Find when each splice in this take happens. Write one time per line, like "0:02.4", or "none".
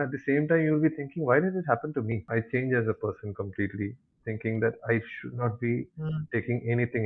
0:02.2